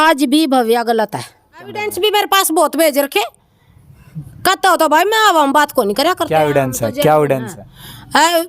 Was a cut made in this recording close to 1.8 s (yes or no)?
yes